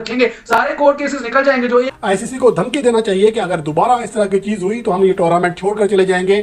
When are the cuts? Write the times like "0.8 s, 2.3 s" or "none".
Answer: 1.9 s